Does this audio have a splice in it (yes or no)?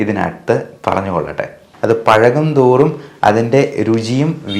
yes